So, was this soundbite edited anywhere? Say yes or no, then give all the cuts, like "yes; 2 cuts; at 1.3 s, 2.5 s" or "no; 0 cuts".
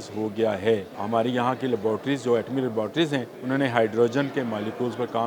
yes; 2 cuts; at 1.0 s, 3.3 s